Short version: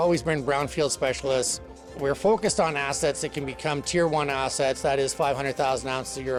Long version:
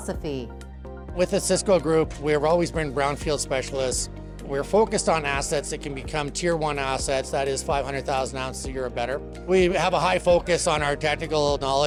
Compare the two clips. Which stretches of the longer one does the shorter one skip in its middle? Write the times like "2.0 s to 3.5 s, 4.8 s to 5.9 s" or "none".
none

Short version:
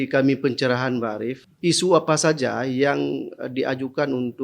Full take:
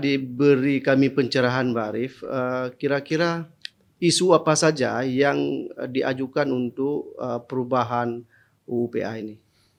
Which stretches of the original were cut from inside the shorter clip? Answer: 2.1 s to 3.8 s

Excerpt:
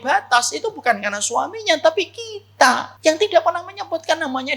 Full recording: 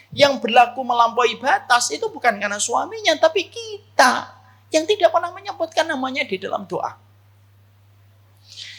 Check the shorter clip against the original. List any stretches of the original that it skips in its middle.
4.3 s to 4.6 s

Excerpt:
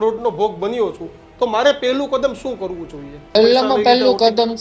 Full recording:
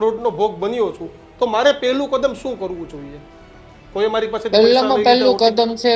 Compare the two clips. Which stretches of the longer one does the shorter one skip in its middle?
3.4 s to 4.5 s

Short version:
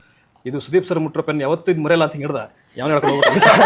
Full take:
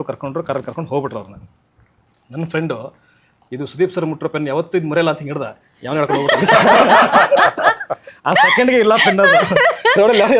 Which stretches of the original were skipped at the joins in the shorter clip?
none

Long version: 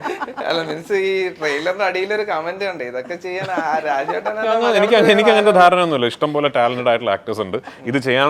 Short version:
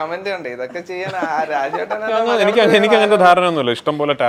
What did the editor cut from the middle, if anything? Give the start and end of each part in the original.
none

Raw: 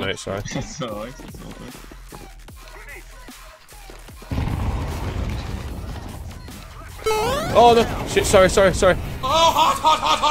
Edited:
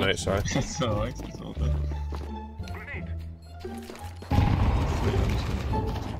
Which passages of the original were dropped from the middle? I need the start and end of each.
none

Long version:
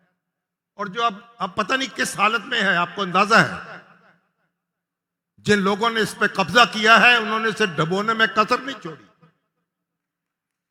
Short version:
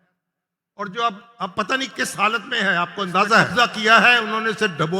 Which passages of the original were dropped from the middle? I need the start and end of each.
3.5 s to 6.5 s

